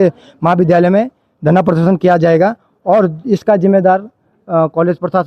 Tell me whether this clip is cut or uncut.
uncut